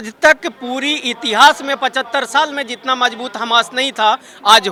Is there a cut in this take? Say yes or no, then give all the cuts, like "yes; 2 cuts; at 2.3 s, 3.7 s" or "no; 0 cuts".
no; 0 cuts